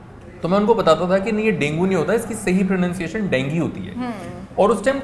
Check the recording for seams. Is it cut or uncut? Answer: uncut